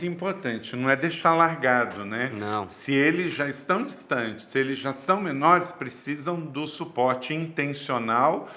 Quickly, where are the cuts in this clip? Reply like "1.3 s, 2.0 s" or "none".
none